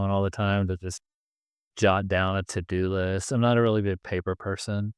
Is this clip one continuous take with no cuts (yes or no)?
yes